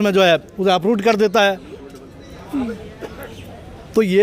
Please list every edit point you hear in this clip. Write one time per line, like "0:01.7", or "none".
none

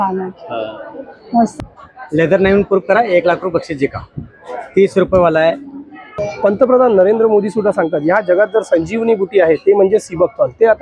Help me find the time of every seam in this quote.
0:01.5
0:06.1

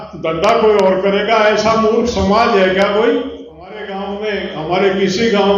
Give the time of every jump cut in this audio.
0:03.9

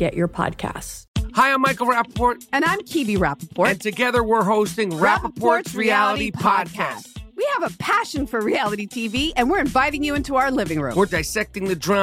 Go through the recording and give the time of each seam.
0:00.9

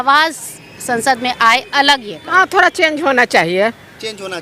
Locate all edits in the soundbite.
0:02.2

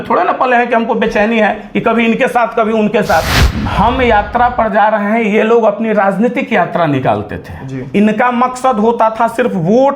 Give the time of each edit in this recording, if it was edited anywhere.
0:03.4

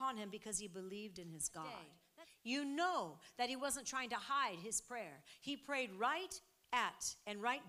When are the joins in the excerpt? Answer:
0:02.0

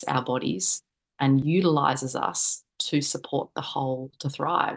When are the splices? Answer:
0:01.4

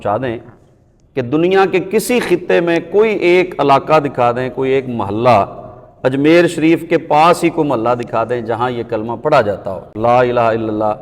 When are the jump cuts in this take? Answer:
none

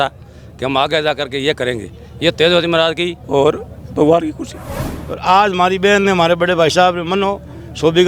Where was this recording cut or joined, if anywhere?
0:03.1
0:04.9

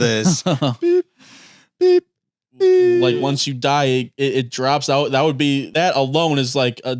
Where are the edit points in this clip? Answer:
0:03.1
0:05.7

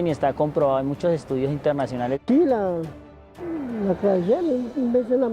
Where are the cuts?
0:02.1

